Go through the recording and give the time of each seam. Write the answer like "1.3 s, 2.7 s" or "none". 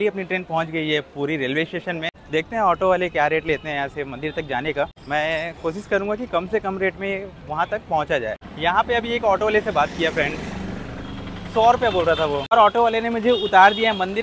2.2 s, 5.0 s, 8.5 s, 12.5 s